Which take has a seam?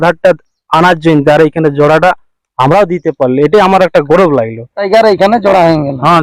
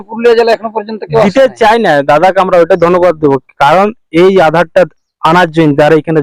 first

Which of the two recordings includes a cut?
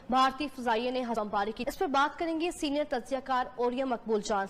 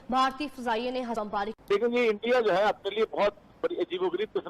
second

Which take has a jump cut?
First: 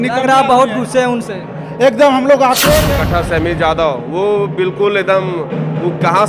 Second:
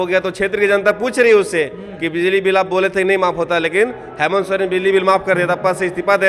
first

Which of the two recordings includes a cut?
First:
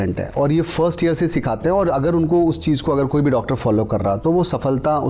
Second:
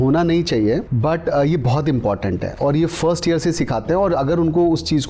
second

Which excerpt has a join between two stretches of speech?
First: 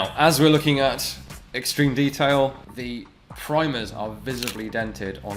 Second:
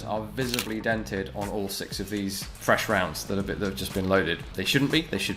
first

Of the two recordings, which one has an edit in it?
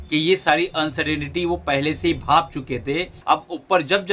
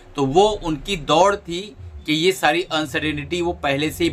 first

